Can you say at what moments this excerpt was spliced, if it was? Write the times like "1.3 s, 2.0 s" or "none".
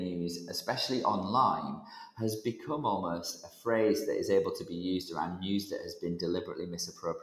none

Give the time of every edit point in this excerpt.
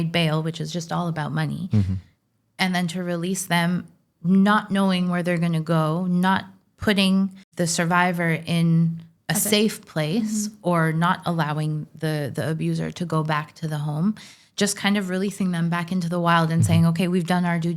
7.4 s, 9.1 s

